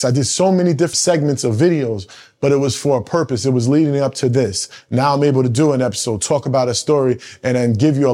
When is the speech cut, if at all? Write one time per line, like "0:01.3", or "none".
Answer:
0:00.9